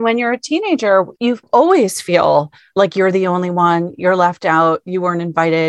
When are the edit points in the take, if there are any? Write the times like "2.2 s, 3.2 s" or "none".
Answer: 1.1 s